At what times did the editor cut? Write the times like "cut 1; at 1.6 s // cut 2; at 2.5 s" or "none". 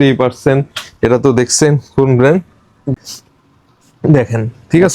cut 1; at 2.9 s